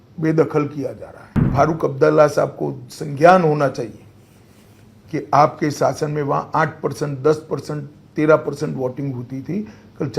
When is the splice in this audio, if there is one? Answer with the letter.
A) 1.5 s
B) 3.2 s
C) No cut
A